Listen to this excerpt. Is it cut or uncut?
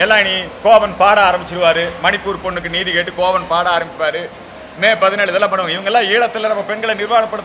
uncut